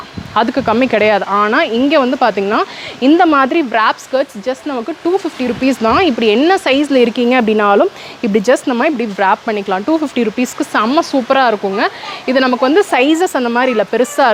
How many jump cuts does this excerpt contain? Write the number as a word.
zero